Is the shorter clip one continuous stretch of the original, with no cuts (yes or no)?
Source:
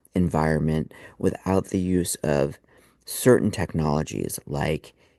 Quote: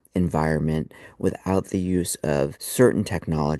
no